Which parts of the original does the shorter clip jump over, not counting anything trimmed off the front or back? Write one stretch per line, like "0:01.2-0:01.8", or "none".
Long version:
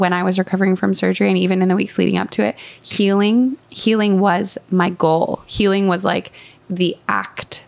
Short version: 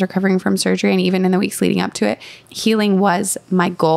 0:02.8-0:03.7